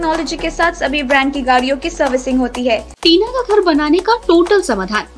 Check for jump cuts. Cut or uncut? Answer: cut